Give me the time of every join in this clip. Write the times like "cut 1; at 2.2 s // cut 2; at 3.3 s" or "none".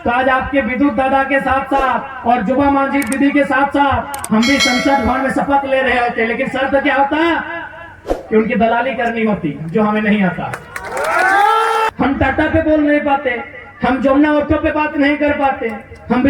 cut 1; at 11.9 s